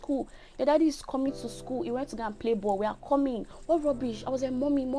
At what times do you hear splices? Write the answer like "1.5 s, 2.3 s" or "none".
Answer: none